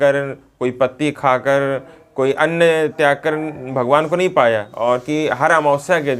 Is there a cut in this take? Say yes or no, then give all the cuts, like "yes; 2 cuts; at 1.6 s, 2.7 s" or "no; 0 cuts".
yes; 1 cut; at 4.7 s